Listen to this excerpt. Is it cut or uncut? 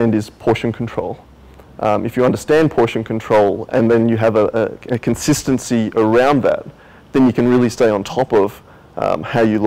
uncut